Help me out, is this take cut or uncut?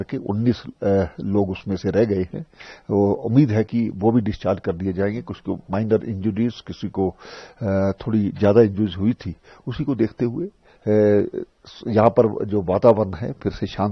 uncut